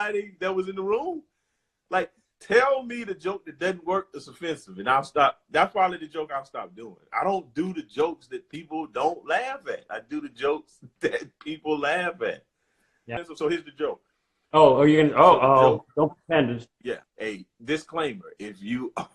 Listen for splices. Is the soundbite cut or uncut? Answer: cut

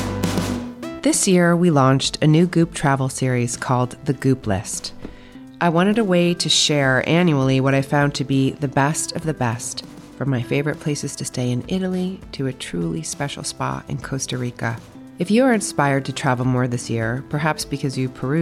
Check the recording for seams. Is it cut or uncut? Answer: cut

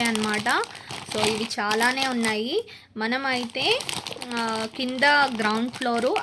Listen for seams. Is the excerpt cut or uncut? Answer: uncut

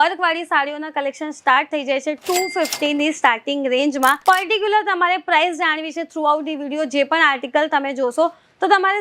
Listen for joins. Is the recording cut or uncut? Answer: cut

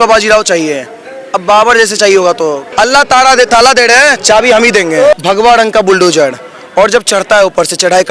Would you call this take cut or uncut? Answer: cut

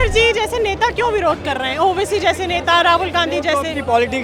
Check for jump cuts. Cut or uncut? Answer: uncut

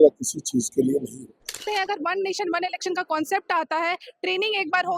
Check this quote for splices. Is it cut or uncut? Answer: cut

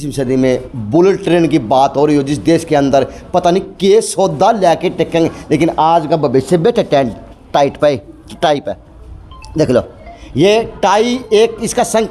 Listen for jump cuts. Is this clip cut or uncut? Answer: uncut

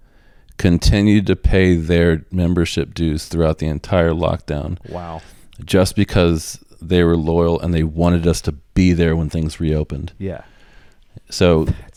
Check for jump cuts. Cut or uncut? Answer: uncut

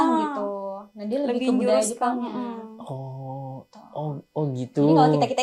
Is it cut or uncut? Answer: uncut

